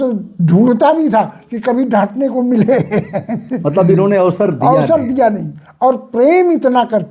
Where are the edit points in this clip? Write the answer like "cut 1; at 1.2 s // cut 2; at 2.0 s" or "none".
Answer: none